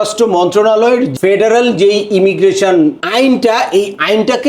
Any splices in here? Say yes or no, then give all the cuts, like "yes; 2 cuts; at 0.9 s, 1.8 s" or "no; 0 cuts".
yes; 2 cuts; at 1.1 s, 3.0 s